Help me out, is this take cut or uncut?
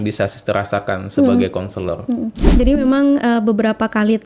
cut